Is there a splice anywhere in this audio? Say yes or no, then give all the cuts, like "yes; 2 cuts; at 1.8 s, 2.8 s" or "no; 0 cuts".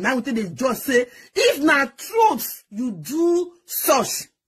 no; 0 cuts